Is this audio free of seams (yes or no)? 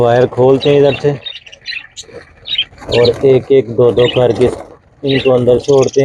yes